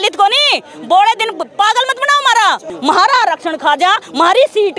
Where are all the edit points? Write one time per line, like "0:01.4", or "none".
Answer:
0:02.7